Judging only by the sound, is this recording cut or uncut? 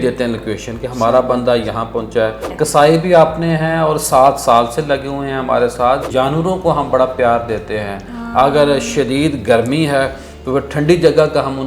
cut